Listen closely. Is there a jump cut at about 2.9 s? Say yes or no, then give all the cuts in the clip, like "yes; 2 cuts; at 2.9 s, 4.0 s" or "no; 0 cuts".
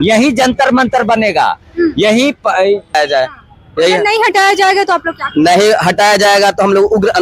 yes; 1 cut; at 2.9 s